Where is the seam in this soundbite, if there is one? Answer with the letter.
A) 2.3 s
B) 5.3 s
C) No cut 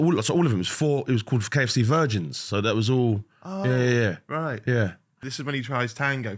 B